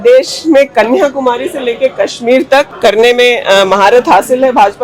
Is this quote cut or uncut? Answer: cut